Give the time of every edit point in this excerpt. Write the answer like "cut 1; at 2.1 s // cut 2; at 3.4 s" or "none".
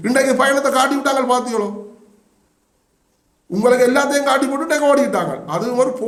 none